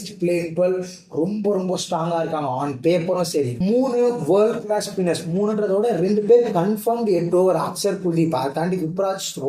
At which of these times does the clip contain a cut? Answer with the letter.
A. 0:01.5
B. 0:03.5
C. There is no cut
B